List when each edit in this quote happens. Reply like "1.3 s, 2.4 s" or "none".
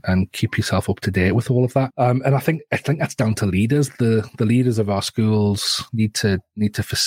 1.9 s, 5.8 s